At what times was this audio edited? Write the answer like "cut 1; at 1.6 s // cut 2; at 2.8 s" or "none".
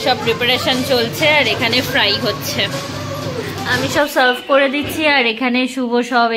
cut 1; at 3.7 s